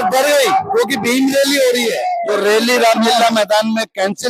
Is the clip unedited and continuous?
no; 1 cut; at 2.2 s

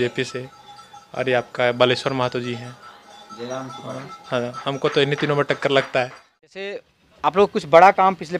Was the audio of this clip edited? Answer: yes; 1 cut; at 6.8 s

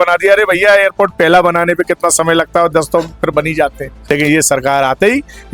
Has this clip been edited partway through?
yes; 1 cut; at 4.0 s

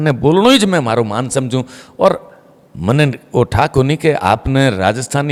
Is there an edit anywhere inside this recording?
no; 0 cuts

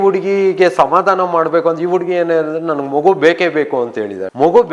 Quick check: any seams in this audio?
no; 0 cuts

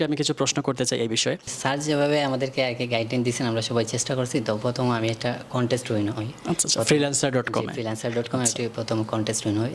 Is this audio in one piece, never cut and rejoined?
no; 1 cut; at 1.5 s

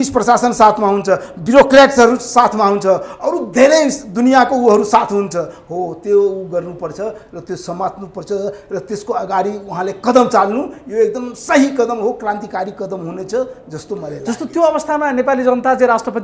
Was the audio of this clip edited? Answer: no; 0 cuts

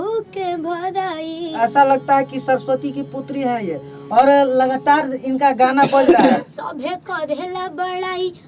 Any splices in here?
yes; 2 cuts; at 1.5 s, 6.6 s

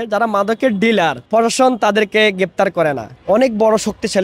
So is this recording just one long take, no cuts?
no; 2 cuts; at 1.2 s, 3.1 s

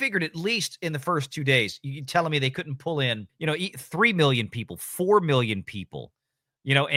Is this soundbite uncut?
yes; 0 cuts

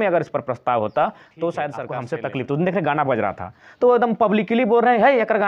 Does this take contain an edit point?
yes; 1 cut; at 1.9 s

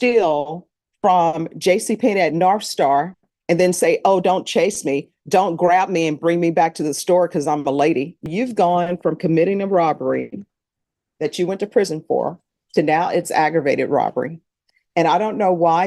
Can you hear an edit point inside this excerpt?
yes; 1 cut; at 8.3 s

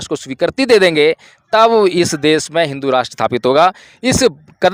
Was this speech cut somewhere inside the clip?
no; 0 cuts

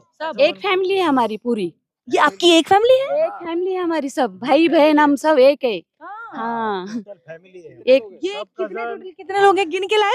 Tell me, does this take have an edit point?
no; 0 cuts

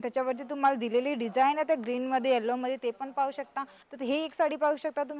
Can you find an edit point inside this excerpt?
yes; 1 cut; at 3.8 s

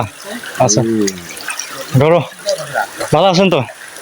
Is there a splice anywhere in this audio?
yes; 1 cut; at 3.0 s

